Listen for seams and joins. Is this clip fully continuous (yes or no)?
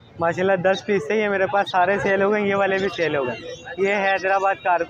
yes